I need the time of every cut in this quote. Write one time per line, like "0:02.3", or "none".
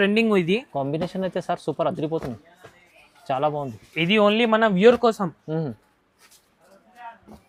none